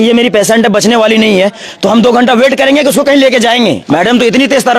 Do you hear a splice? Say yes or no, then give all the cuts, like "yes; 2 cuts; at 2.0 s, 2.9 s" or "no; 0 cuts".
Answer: yes; 1 cut; at 3.8 s